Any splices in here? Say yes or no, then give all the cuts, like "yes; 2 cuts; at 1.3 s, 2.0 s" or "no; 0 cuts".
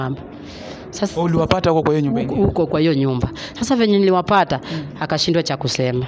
no; 0 cuts